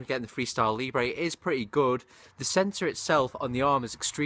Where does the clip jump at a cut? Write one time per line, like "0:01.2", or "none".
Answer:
none